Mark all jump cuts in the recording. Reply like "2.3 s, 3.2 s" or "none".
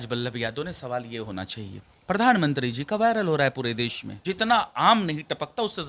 1.9 s, 4.1 s